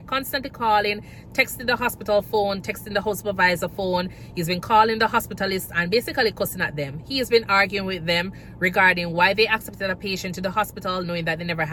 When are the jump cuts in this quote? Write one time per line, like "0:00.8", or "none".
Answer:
none

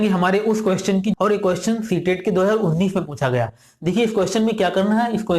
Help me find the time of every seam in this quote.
0:01.1

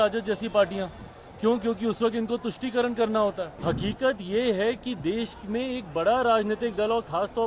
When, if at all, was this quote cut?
0:03.5

